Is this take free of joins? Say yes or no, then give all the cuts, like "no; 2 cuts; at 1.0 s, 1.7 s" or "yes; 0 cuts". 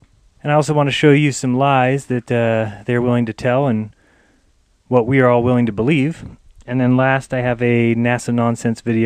no; 1 cut; at 3.1 s